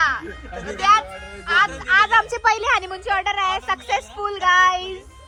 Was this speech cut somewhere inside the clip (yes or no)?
no